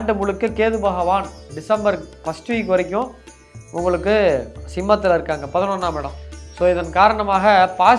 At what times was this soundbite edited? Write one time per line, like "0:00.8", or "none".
none